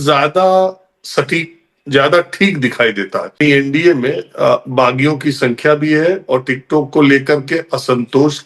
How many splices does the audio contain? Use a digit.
1